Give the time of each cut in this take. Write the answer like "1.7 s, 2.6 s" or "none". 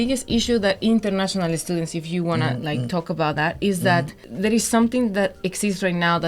4.2 s